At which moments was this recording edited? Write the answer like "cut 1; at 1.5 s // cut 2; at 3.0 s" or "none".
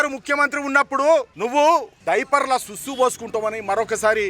cut 1; at 1.4 s // cut 2; at 1.9 s